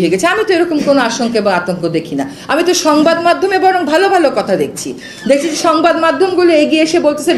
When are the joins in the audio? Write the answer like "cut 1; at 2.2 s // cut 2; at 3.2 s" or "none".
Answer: none